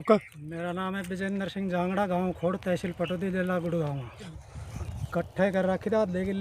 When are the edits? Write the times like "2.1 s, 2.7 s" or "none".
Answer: 4.3 s